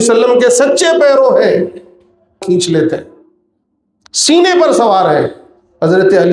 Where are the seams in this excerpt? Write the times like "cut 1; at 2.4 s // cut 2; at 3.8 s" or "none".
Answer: cut 1; at 2.4 s

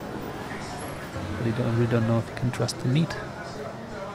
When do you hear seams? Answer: cut 1; at 1.3 s

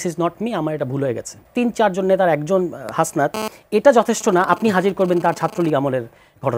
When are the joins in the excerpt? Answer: cut 1; at 1.4 s

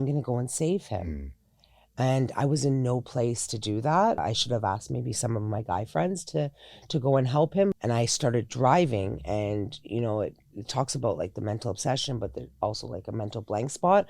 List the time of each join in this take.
cut 1; at 4.2 s // cut 2; at 7.8 s

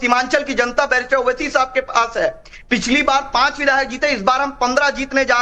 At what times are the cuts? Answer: cut 1; at 2.2 s

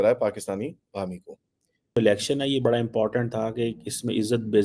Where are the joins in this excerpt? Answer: cut 1; at 2.0 s

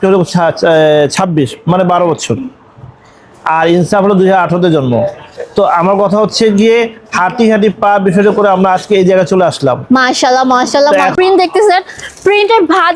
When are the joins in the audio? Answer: cut 1; at 11.1 s

